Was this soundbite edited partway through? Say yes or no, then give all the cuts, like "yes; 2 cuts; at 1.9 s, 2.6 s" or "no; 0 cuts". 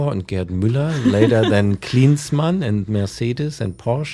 no; 0 cuts